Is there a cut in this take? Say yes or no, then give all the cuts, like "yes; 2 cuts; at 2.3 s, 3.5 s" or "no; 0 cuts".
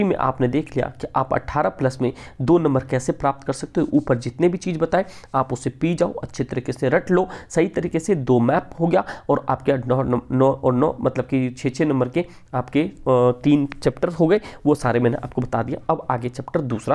no; 0 cuts